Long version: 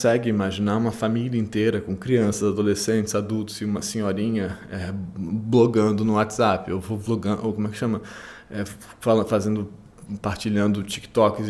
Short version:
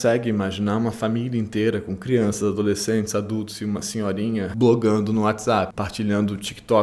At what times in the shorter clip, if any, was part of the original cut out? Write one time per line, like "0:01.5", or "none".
0:04.5
0:05.7